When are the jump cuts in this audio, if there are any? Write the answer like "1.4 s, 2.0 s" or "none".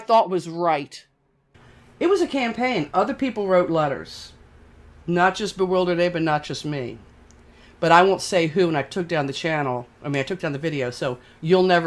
1.3 s